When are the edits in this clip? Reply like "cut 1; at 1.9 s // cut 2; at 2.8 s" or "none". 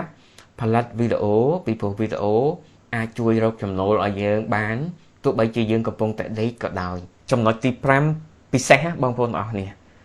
cut 1; at 7.1 s